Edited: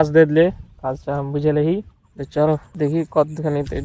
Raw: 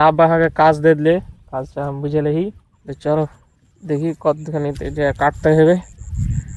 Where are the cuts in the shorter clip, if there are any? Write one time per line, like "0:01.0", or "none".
0:02.7